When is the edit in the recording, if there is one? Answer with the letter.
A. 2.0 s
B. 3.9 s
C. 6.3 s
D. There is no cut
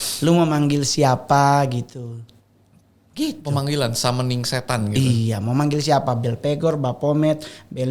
D